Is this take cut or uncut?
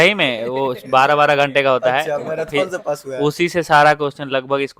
uncut